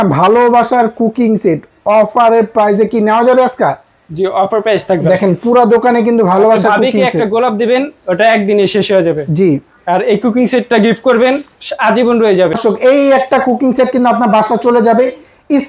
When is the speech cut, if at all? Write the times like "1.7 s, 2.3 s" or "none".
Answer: 12.6 s